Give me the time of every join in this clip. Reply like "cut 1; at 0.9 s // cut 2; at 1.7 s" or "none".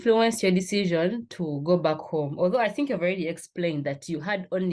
none